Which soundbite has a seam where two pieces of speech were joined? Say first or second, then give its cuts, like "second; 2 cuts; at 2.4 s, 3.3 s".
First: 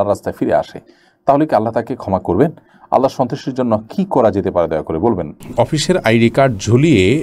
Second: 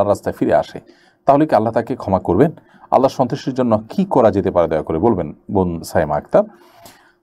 first; 1 cut; at 5.4 s